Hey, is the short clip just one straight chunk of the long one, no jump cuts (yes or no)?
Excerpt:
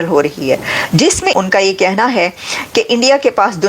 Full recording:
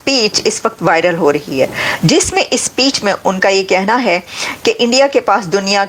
no